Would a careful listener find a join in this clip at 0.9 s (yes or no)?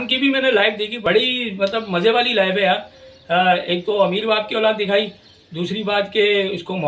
yes